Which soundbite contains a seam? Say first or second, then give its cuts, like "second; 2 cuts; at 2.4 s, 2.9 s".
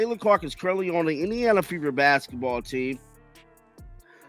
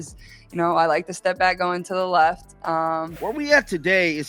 second; 1 cut; at 3.1 s